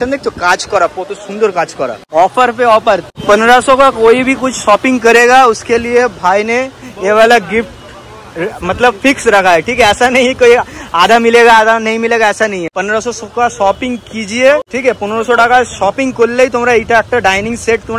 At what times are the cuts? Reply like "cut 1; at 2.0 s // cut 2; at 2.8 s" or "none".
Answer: cut 1; at 2.0 s // cut 2; at 3.1 s // cut 3; at 12.7 s // cut 4; at 14.7 s